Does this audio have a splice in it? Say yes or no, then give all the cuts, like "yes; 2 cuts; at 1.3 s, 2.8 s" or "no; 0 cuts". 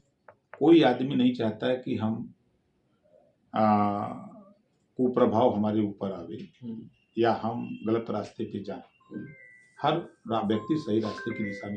no; 0 cuts